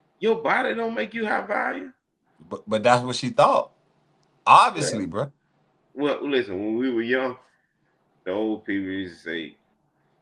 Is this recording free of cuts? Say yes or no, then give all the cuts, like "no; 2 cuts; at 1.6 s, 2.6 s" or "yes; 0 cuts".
yes; 0 cuts